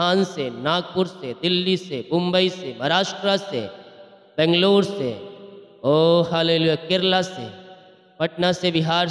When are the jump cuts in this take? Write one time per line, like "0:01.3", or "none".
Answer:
none